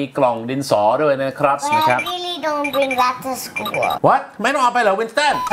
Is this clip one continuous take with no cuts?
no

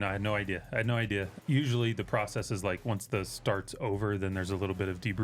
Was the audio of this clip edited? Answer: yes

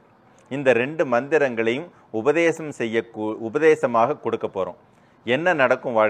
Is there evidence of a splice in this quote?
no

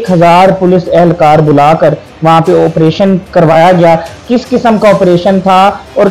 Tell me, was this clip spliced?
no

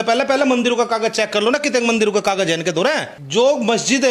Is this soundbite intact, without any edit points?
no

